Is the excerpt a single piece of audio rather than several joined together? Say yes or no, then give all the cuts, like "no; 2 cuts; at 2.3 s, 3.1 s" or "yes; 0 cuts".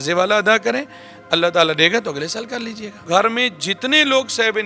no; 1 cut; at 3.1 s